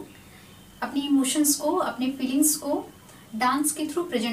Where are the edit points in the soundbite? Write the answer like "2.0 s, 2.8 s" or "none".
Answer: none